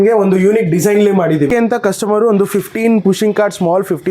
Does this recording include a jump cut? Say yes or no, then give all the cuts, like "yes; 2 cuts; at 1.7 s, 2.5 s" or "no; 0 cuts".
yes; 1 cut; at 1.5 s